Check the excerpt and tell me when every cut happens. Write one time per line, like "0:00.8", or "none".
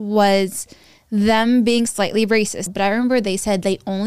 0:02.6